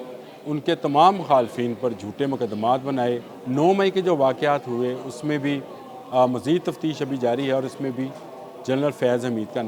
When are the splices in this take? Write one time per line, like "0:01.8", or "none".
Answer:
0:03.3